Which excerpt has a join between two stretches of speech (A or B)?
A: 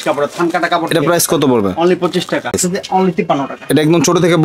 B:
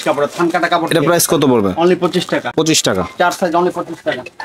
A